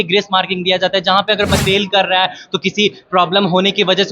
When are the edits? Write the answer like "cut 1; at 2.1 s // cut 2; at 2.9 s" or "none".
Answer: cut 1; at 1.6 s

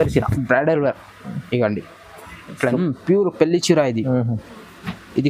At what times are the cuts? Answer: cut 1; at 2.8 s

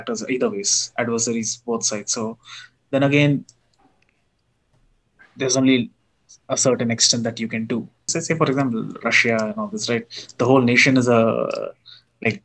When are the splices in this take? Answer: cut 1; at 8.1 s

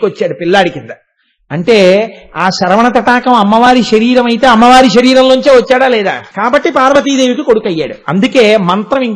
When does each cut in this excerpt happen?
cut 1; at 6.2 s

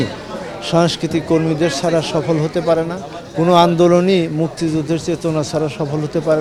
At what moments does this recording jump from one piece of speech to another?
none

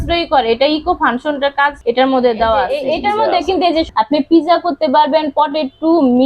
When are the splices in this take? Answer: cut 1; at 1.8 s // cut 2; at 2.7 s // cut 3; at 3.9 s

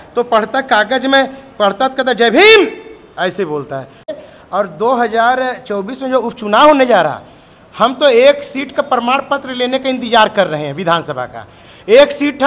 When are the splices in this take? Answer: cut 1; at 4.1 s

